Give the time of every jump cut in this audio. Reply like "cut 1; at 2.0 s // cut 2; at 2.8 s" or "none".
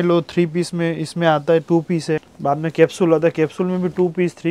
cut 1; at 2.3 s